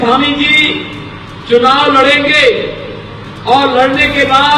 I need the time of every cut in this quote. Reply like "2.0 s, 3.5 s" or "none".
none